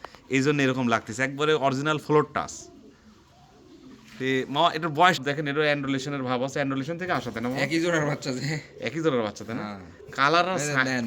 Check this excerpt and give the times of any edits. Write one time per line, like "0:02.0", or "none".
0:05.2